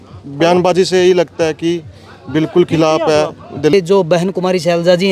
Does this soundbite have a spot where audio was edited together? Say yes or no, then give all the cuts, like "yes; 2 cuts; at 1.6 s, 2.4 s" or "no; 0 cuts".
yes; 1 cut; at 3.7 s